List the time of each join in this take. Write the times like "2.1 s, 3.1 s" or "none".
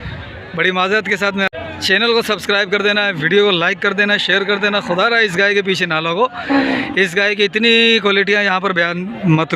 1.6 s